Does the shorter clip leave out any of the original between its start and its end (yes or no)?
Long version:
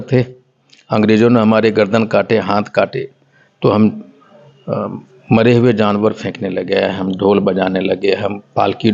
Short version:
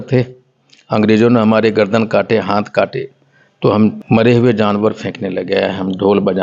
yes